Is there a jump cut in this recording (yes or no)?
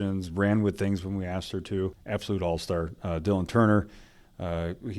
yes